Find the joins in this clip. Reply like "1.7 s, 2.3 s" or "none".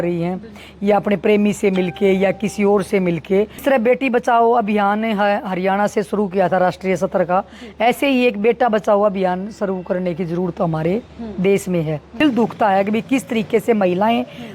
3.6 s, 12.2 s